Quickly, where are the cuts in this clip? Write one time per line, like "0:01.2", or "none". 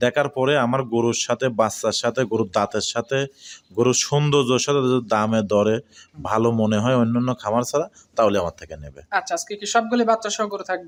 none